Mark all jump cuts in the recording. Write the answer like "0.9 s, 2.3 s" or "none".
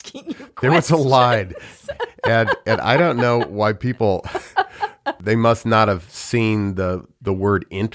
5.1 s